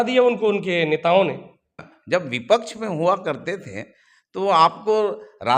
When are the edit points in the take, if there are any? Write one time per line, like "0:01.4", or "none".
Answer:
0:01.8